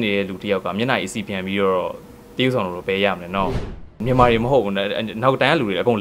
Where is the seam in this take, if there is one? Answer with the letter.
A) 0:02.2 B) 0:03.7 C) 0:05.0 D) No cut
B